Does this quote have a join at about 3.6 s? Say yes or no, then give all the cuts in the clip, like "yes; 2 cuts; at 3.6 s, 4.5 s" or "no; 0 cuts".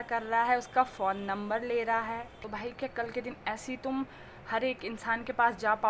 no; 1 cut; at 2.4 s